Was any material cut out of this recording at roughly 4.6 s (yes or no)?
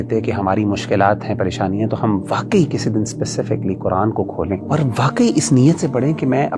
yes